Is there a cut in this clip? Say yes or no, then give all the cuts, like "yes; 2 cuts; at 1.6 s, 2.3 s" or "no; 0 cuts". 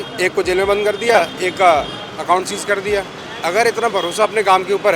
yes; 1 cut; at 3.2 s